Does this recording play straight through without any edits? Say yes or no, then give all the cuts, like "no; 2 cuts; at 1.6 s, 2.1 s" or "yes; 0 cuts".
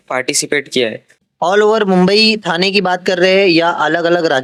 yes; 0 cuts